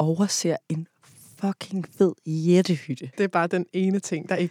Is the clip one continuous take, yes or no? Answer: no